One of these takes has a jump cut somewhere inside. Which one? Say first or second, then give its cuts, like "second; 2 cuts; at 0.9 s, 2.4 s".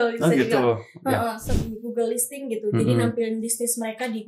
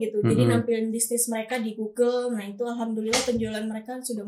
first; 1 cut; at 1.4 s